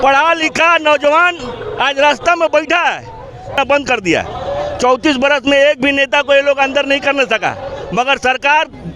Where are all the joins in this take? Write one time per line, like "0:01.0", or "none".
0:03.5